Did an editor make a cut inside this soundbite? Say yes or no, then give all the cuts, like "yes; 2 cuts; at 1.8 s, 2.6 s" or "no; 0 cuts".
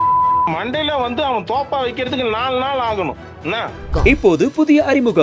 yes; 1 cut; at 3.9 s